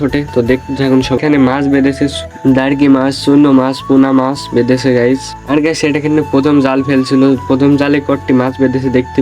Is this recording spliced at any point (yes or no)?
yes